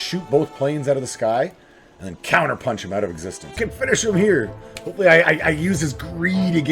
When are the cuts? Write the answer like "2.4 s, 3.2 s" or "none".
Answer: 3.6 s